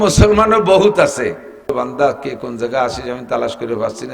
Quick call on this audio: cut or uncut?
cut